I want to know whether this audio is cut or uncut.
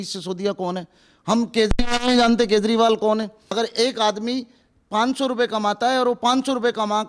cut